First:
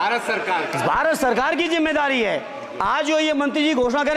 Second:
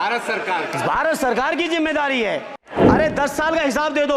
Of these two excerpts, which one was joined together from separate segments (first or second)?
second